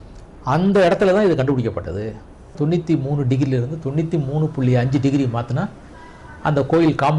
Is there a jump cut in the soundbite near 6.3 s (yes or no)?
no